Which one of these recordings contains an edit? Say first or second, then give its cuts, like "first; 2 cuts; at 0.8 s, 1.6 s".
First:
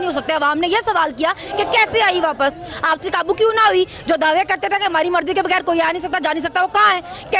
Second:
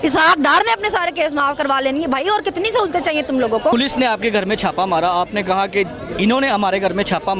second; 1 cut; at 3.7 s